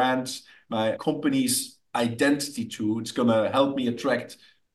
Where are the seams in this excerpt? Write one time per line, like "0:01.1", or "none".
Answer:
0:01.0